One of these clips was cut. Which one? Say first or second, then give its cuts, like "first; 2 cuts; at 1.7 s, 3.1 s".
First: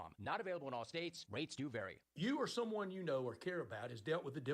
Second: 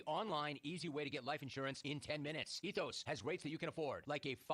first; 1 cut; at 2.0 s